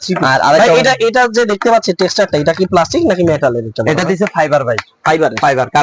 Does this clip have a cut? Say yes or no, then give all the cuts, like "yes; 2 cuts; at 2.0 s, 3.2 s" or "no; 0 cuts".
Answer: no; 0 cuts